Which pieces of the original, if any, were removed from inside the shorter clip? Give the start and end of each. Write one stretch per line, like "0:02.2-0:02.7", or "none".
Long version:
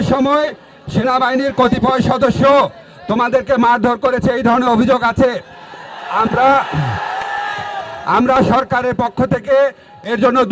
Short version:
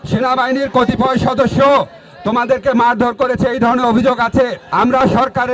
0:05.4-0:08.0

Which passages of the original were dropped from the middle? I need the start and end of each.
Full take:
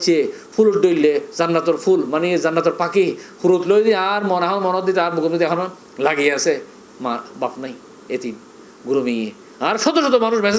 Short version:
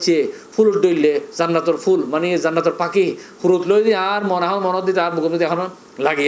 none

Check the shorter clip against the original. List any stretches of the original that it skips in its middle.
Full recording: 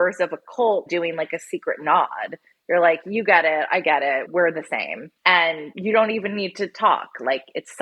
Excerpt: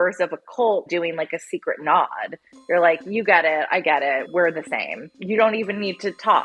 0:05.1-0:05.7

